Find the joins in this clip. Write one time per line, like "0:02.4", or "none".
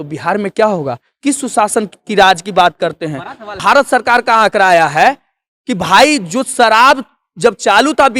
0:03.6